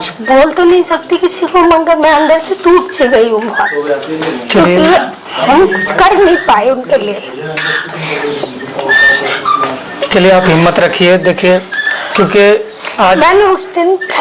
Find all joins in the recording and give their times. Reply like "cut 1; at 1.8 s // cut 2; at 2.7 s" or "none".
none